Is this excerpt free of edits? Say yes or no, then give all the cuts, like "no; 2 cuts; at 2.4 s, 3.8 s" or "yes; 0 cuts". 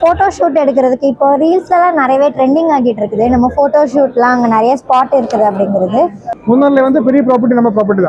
no; 1 cut; at 6.3 s